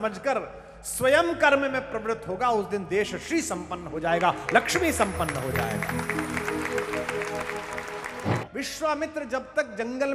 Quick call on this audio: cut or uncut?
cut